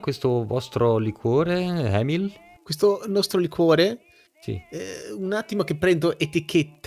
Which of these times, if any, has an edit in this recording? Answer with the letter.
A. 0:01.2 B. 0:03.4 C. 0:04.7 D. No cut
D